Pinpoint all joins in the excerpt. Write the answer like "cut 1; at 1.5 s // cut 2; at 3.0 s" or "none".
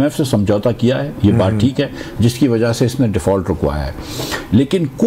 none